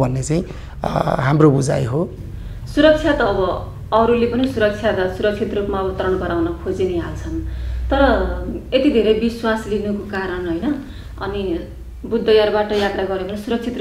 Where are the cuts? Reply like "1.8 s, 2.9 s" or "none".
none